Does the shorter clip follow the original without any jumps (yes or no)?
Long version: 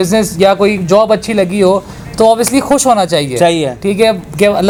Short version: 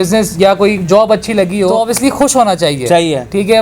no